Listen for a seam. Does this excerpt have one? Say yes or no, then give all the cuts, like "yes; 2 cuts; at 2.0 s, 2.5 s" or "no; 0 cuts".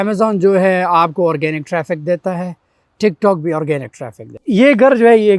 yes; 1 cut; at 4.3 s